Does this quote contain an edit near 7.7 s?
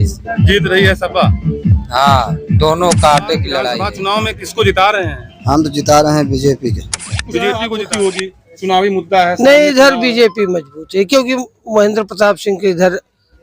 yes; 2 cuts; at 3.7 s, 7.7 s

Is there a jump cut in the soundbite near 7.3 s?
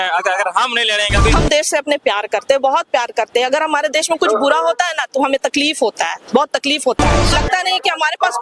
yes; 2 cuts; at 1.3 s, 7.3 s

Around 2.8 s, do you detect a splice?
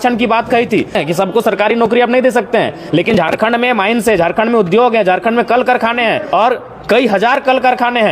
no; 2 cuts; at 1.0 s, 6.2 s

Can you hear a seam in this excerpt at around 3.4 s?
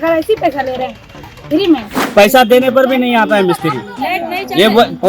no; 1 cut; at 2.0 s

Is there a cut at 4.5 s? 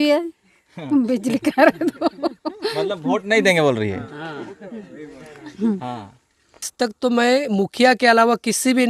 no; 1 cut; at 6.7 s

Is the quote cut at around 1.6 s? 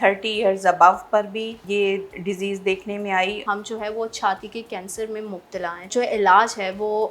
yes; 3 cuts; at 1.6 s, 3.4 s, 5.9 s

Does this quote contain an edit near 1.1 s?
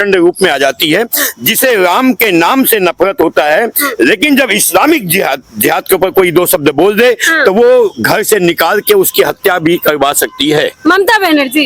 no; 0 cuts

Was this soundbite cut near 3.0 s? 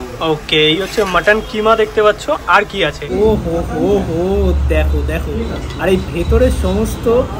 yes; 1 cut; at 3.0 s

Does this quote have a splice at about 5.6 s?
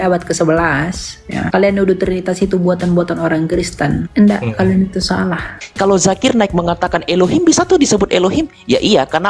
yes; 1 cut; at 5.6 s

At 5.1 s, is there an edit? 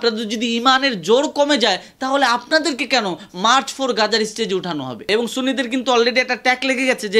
yes; 1 cut; at 5.1 s

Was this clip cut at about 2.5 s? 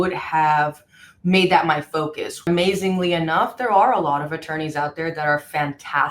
yes; 1 cut; at 2.5 s

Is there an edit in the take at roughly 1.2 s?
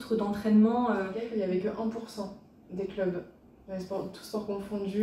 yes; 1 cut; at 1.2 s

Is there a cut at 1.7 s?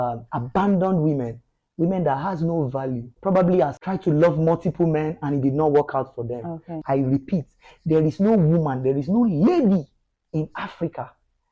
no; 3 cuts; at 3.1 s, 3.8 s, 6.7 s

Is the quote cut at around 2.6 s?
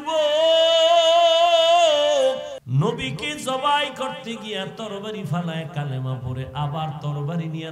yes; 1 cut; at 2.6 s

